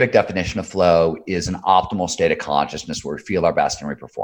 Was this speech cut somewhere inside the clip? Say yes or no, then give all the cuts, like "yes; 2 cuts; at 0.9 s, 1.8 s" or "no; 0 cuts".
no; 0 cuts